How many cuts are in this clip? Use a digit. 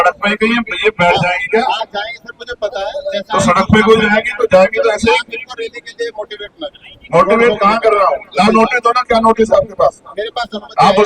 1